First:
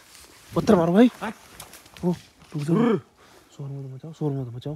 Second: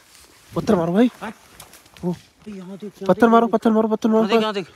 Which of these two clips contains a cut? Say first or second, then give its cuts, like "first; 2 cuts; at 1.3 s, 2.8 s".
second; 1 cut; at 2.5 s